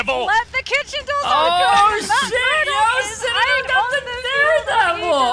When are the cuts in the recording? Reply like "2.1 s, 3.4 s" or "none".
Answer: none